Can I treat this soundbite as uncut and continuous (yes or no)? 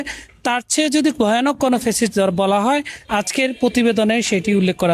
no